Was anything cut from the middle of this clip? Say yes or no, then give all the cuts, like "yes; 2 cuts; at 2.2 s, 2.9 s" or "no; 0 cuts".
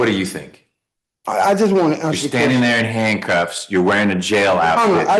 no; 0 cuts